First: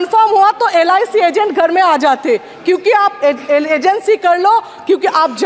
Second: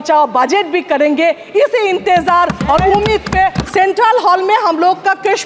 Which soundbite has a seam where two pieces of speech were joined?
second; 1 cut; at 3.6 s

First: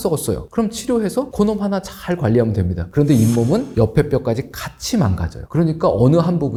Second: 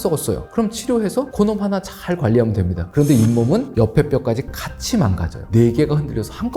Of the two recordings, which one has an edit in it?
second; 1 cut; at 5.5 s

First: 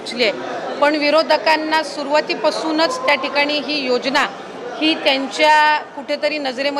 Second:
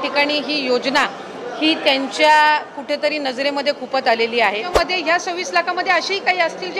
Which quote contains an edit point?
second; 1 cut; at 4.7 s

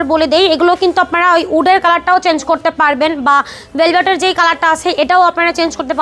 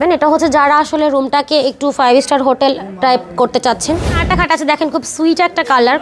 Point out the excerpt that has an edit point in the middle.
second; 1 cut; at 4.2 s

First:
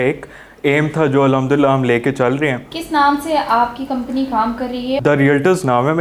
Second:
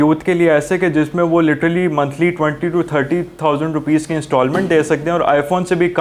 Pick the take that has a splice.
first; 1 cut; at 5.0 s

